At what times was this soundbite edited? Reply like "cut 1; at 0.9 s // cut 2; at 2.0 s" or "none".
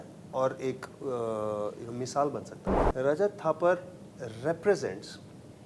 cut 1; at 2.6 s